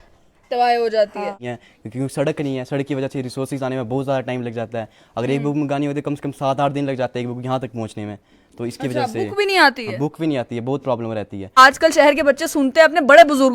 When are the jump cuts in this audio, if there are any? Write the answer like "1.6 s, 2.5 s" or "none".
1.4 s, 11.6 s

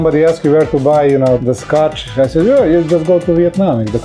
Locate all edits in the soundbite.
1.4 s

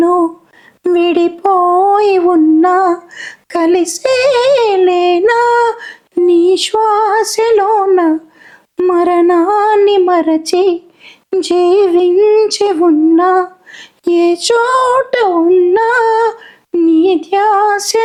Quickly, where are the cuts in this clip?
none

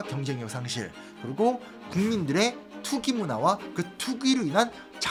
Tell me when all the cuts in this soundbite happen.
none

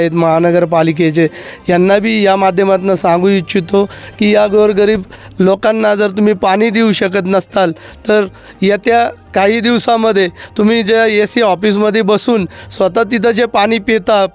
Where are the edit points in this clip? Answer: none

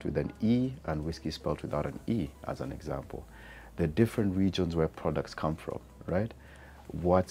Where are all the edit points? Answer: none

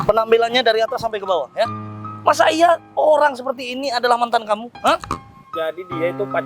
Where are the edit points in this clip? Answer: 5.3 s

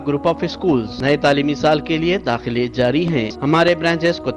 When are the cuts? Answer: 0.9 s, 3.3 s

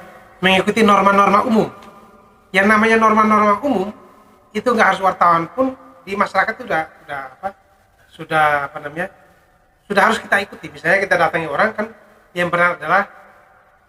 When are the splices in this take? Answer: none

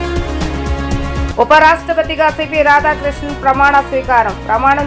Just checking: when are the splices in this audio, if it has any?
1.3 s

